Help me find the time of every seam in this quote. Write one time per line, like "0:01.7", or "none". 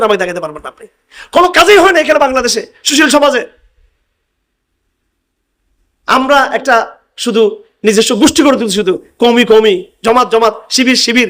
none